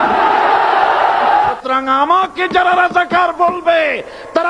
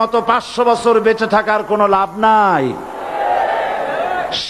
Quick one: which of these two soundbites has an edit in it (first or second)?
first